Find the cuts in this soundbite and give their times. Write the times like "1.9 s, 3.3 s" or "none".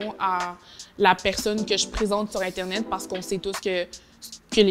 none

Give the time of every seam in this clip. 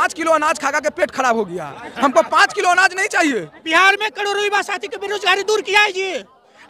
3.7 s

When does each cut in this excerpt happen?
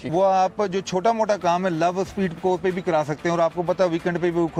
none

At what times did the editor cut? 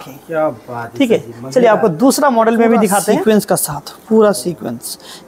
3.2 s

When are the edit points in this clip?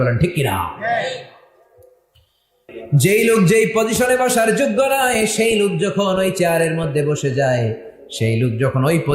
2.6 s

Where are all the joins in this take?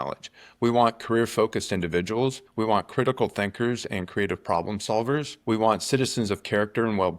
2.4 s, 5.3 s

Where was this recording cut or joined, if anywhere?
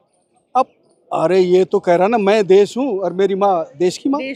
none

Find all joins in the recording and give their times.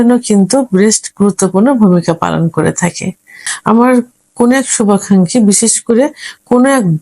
3.5 s

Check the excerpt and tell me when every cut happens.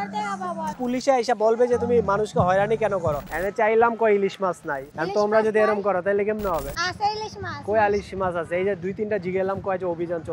0.8 s, 3.2 s, 6.8 s

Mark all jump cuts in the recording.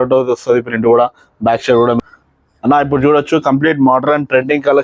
2.1 s

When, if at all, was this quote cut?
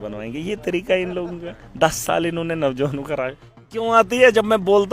3.7 s

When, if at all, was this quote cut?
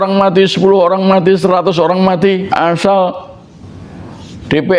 2.5 s

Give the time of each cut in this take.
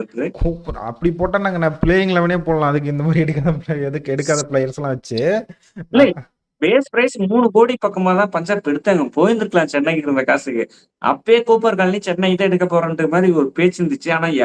none

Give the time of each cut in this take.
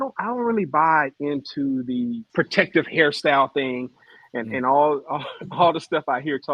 2.3 s

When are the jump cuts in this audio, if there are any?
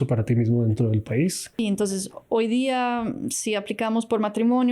1.5 s

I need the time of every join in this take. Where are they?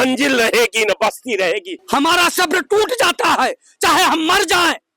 1.8 s

